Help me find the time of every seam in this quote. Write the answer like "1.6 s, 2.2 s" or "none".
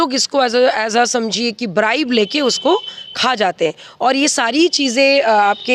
none